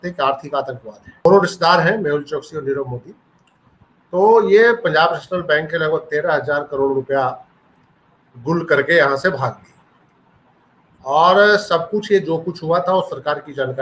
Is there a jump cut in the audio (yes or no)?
yes